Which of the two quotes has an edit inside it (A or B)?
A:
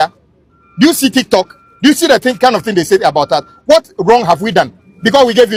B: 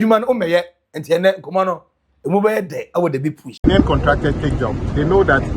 B